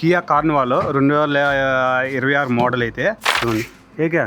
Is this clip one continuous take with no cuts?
no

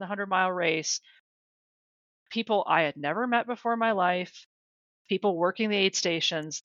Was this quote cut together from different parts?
no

